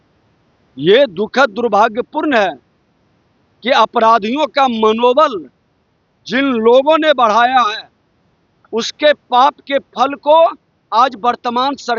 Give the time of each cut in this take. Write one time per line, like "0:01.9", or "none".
none